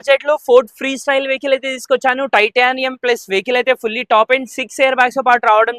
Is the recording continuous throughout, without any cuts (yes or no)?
yes